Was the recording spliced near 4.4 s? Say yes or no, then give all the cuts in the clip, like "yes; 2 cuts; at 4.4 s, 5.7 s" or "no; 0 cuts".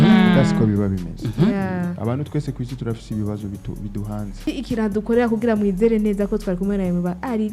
yes; 1 cut; at 4.4 s